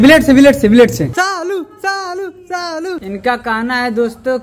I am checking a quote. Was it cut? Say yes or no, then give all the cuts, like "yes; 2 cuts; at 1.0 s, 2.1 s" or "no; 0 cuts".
yes; 2 cuts; at 1.1 s, 3.0 s